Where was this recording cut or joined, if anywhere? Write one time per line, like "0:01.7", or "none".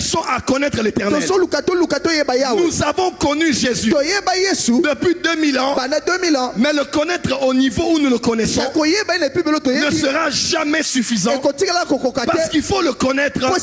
none